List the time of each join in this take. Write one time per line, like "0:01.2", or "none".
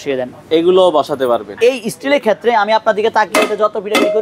0:01.6

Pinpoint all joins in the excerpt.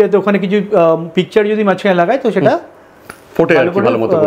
none

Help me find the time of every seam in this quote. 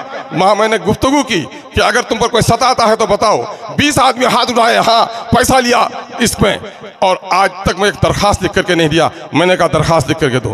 none

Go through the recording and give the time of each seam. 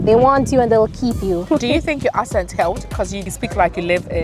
0:01.4
0:03.2

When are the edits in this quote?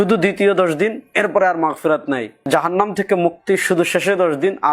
0:02.3

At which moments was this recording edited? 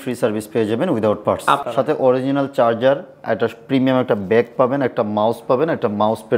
0:01.6

